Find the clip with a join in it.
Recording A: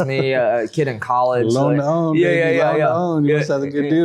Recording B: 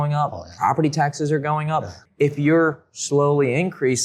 B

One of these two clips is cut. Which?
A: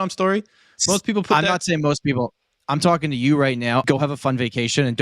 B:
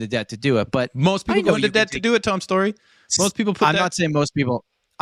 A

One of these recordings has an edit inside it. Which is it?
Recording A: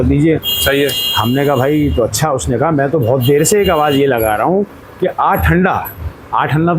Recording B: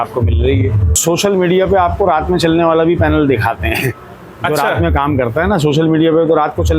B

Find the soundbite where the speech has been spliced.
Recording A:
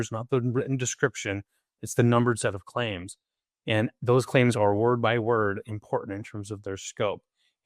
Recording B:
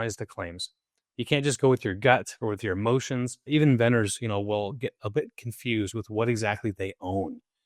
B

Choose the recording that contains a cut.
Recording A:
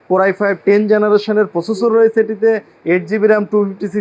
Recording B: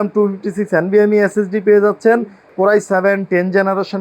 B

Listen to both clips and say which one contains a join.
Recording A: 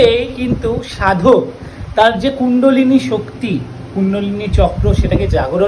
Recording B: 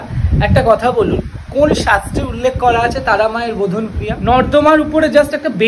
B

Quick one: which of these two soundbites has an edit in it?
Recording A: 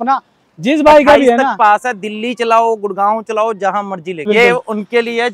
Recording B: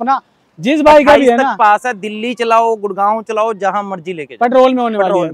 A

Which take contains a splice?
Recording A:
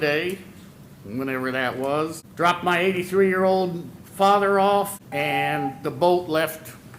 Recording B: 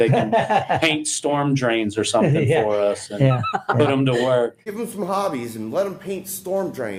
A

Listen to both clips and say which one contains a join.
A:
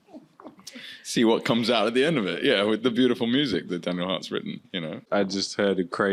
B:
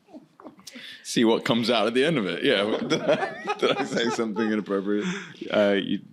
B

